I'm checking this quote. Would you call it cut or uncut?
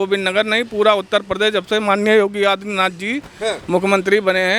uncut